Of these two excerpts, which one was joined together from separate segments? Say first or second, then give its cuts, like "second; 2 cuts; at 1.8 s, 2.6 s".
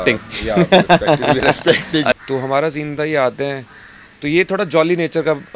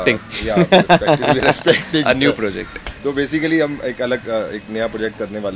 first; 1 cut; at 2.2 s